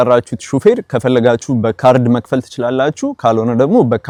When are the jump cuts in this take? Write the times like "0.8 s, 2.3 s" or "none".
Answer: none